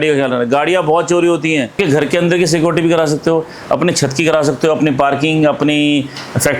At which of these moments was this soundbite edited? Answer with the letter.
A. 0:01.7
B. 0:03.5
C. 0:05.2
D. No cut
A